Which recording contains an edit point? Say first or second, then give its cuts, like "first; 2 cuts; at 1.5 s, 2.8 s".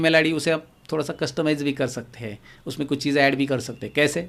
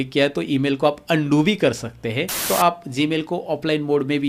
second; 1 cut; at 2.5 s